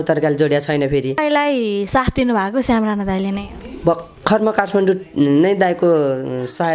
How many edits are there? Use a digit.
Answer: 1